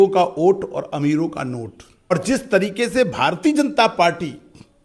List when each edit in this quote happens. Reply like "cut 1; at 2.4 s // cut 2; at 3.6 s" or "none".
cut 1; at 2.1 s